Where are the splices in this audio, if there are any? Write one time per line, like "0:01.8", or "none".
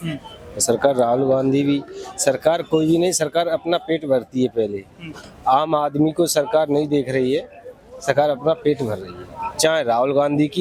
none